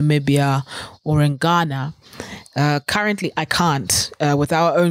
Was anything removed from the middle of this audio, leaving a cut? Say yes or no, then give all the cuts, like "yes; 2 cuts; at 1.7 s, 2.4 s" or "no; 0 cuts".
no; 0 cuts